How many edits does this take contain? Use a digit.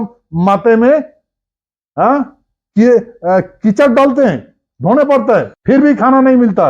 1